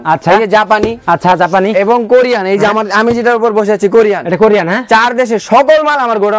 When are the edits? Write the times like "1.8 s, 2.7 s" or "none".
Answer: none